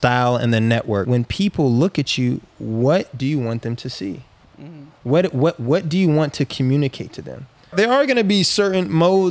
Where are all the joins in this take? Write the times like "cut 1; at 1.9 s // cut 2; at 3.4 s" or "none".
cut 1; at 1.1 s // cut 2; at 7.7 s